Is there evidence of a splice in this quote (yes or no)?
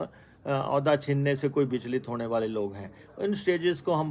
no